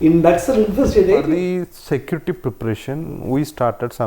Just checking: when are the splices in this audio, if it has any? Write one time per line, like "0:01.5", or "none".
0:01.3